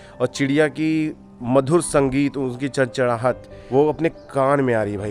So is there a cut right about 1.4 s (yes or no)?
no